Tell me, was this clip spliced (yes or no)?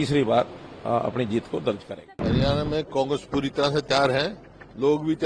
yes